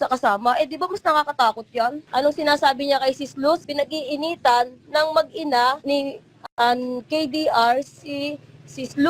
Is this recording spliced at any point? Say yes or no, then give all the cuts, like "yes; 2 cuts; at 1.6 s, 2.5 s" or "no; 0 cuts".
yes; 3 cuts; at 2.0 s, 3.7 s, 5.8 s